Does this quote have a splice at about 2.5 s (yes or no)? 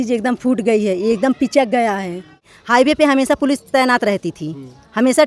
yes